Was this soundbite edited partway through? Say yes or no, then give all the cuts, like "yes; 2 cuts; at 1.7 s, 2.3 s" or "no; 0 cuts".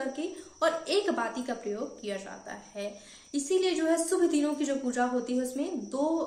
no; 0 cuts